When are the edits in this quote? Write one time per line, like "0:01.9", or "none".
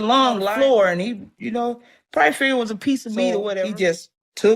none